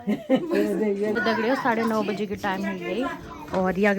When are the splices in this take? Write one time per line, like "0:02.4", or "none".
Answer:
0:01.2